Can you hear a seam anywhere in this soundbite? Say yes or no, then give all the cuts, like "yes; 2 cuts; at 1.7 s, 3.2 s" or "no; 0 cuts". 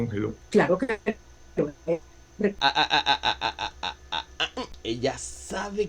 yes; 1 cut; at 2.6 s